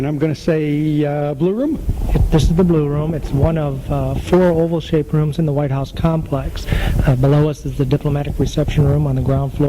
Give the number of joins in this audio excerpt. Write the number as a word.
one